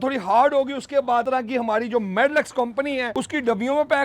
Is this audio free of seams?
no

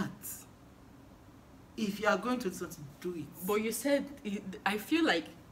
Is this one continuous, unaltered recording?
yes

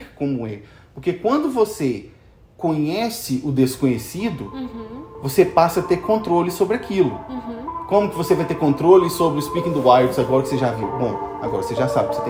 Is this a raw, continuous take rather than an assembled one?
yes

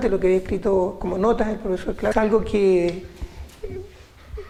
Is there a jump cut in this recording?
no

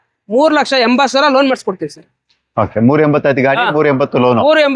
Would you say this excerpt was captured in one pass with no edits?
yes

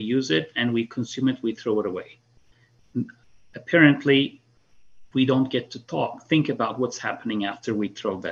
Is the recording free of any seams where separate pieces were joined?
yes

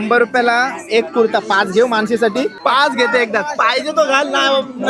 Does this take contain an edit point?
yes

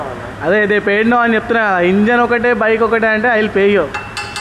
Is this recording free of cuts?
yes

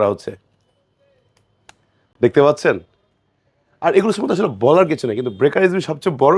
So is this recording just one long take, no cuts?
yes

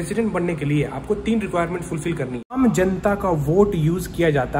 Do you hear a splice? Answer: yes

